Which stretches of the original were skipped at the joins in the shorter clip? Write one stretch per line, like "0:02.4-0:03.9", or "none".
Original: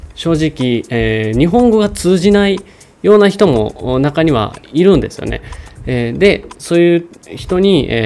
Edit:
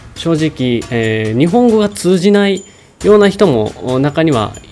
none